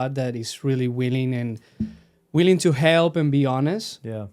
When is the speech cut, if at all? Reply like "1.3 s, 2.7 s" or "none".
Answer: none